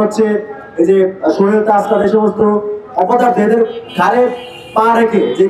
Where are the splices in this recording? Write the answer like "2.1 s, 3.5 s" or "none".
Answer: none